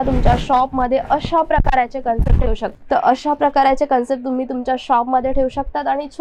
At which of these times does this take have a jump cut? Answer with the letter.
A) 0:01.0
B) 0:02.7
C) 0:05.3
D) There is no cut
B